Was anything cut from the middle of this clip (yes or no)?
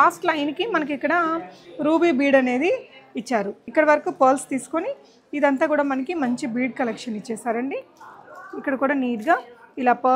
yes